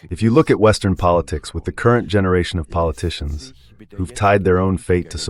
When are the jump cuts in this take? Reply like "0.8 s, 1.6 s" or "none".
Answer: none